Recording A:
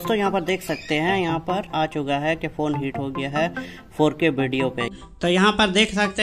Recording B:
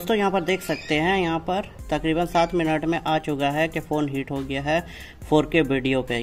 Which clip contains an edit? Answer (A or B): A